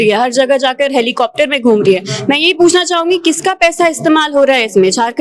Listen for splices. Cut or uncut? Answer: uncut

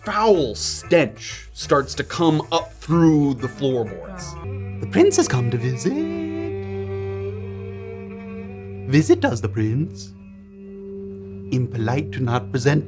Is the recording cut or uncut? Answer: cut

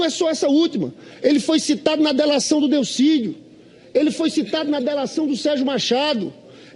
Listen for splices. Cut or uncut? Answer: cut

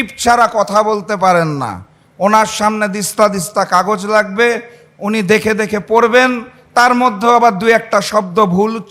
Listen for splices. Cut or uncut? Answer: uncut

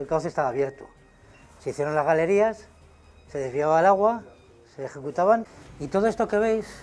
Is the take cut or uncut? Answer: uncut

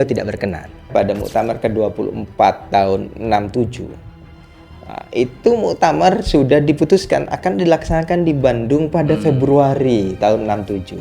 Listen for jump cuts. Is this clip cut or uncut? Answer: cut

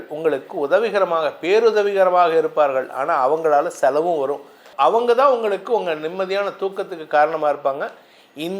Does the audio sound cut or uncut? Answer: uncut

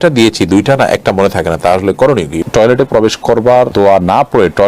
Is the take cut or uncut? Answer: cut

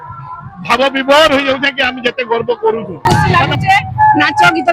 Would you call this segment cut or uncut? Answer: cut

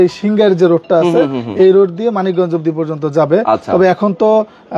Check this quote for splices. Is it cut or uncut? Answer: uncut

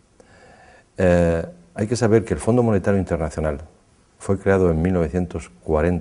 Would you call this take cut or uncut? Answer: cut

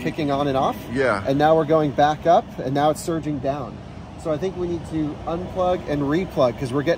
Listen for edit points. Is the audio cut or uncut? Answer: uncut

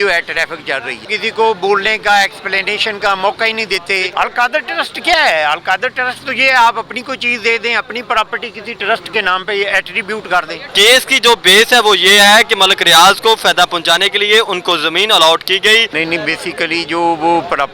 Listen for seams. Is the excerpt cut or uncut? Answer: cut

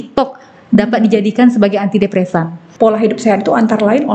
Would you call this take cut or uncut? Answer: cut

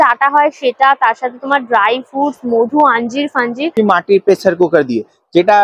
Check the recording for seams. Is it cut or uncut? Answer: cut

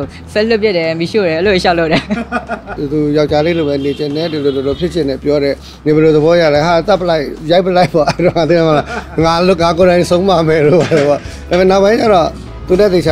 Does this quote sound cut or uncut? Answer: cut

